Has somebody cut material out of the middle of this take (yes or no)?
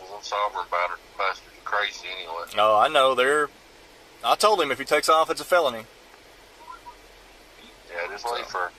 no